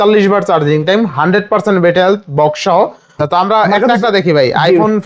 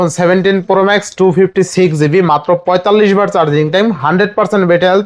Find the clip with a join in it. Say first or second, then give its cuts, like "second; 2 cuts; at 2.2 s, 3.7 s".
first; 1 cut; at 3.2 s